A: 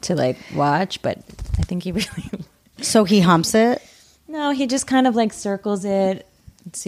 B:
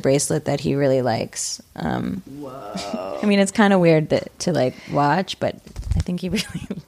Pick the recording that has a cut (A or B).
B